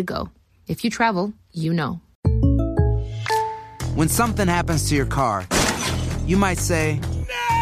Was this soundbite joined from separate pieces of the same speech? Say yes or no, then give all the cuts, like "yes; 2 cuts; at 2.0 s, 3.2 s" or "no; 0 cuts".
yes; 2 cuts; at 2.1 s, 3.7 s